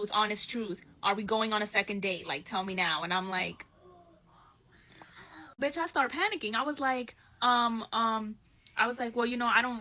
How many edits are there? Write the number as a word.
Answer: one